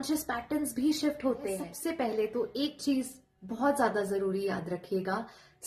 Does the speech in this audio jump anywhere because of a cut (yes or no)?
yes